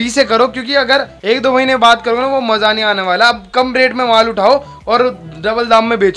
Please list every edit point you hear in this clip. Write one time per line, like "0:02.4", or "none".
none